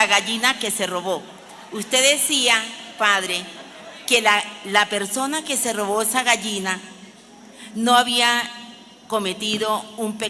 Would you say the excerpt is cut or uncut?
uncut